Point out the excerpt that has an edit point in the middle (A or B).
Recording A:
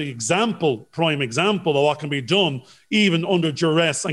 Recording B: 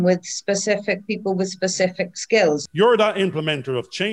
B